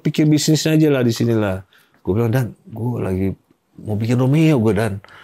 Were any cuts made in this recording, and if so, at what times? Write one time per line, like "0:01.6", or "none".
none